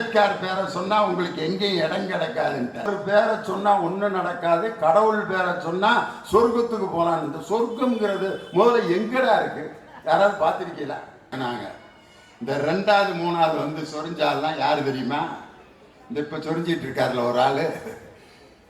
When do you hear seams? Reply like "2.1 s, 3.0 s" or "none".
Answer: 2.9 s, 11.3 s